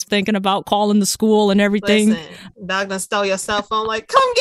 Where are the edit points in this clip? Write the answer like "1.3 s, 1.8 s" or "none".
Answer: none